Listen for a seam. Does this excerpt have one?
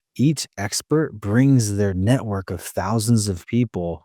no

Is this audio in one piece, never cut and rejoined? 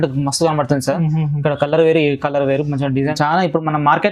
no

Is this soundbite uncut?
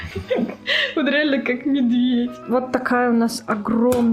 no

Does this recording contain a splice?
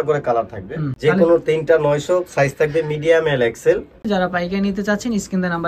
yes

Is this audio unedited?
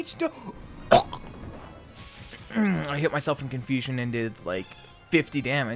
yes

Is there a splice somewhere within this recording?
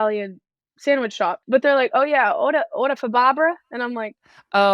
yes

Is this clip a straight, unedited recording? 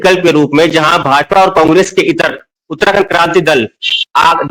yes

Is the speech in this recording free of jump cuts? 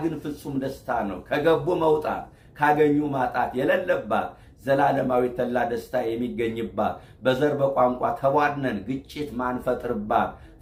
yes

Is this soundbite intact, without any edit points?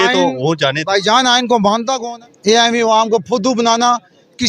no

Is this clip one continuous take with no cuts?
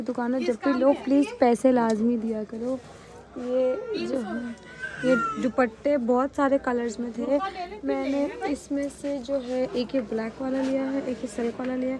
yes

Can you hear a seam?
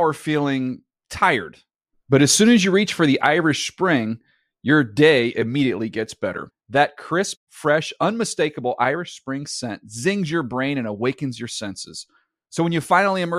no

